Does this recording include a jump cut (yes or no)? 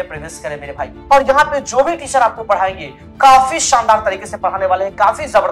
yes